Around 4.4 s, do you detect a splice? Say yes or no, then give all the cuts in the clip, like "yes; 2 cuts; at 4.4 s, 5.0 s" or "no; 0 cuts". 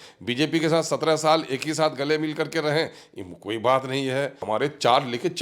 yes; 1 cut; at 4.4 s